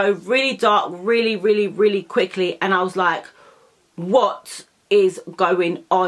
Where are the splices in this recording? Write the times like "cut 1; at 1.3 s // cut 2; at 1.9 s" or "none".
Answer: none